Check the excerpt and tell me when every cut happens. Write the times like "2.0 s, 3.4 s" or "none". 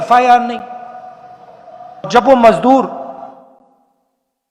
2.1 s